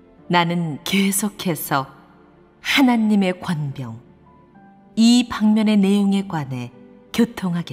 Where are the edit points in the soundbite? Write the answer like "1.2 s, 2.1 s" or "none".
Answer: none

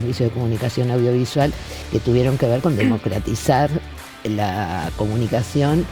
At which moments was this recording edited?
1.7 s

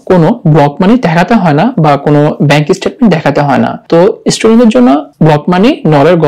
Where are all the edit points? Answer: 3.8 s, 5.1 s

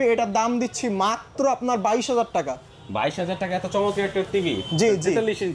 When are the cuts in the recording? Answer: none

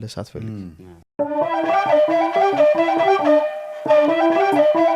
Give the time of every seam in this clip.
1.0 s

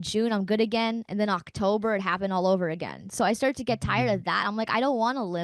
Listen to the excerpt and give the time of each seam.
none

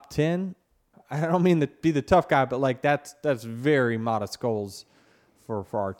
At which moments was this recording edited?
1.0 s

